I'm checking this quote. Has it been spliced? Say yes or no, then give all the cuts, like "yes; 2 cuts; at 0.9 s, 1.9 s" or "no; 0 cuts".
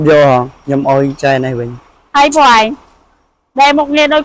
no; 0 cuts